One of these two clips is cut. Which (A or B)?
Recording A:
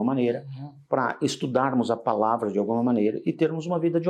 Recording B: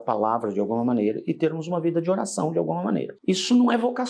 B